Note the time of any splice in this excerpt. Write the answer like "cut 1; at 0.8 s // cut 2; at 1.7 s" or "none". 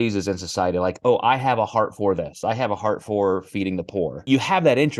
cut 1; at 2.3 s // cut 2; at 4.2 s